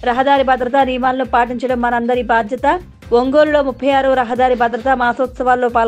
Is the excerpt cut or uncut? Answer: uncut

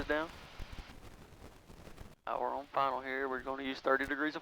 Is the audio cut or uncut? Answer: cut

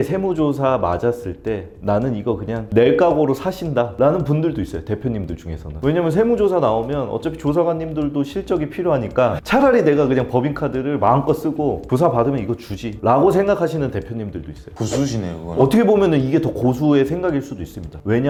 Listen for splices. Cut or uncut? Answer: uncut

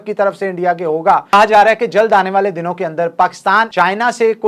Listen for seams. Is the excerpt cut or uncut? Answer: cut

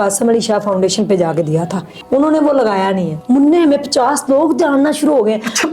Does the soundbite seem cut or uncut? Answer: cut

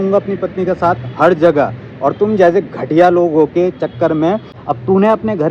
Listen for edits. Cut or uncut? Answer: cut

